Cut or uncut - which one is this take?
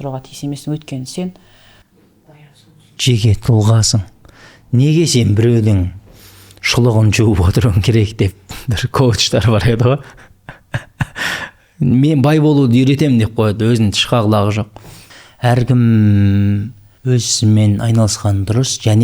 uncut